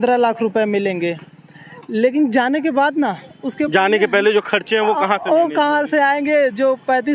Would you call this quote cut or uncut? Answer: uncut